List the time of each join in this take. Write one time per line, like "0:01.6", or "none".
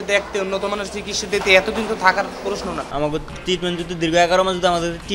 0:02.8